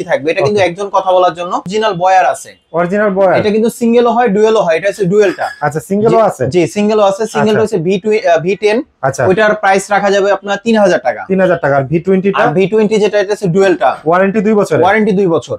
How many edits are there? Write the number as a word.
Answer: one